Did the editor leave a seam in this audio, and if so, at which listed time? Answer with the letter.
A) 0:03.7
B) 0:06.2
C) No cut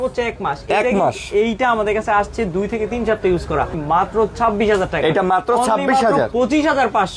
A